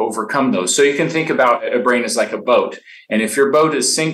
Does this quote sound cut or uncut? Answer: cut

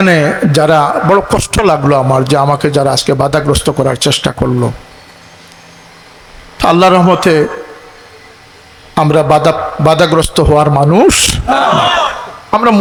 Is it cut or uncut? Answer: uncut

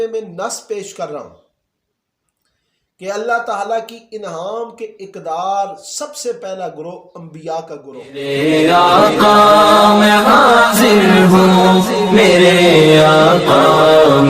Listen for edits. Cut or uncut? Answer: cut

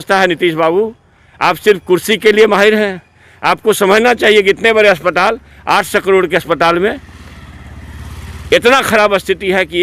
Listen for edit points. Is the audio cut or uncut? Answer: uncut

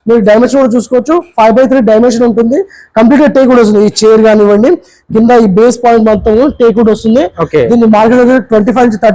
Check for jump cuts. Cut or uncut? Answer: uncut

